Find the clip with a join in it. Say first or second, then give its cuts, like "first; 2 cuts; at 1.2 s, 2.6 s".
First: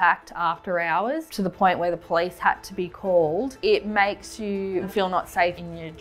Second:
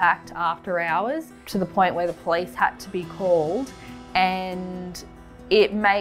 first; 3 cuts; at 1.3 s, 3.5 s, 5.2 s